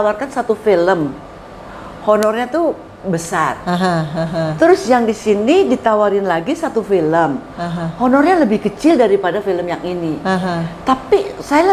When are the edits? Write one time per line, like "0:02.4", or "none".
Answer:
none